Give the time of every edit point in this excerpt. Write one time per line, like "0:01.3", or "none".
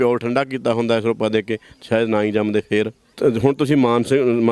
0:03.1